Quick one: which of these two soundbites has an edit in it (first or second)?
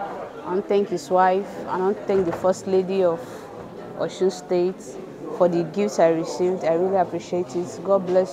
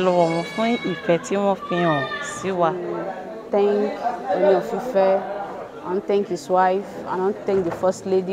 second